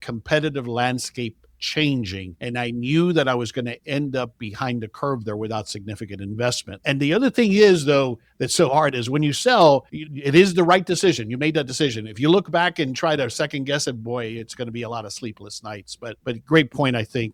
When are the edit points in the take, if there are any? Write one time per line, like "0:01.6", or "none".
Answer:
none